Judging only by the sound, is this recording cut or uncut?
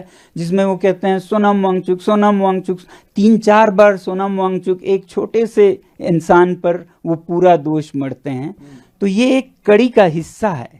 uncut